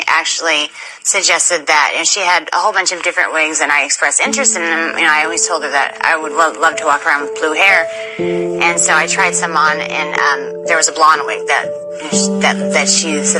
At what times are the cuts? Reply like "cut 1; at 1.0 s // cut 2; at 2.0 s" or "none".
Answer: none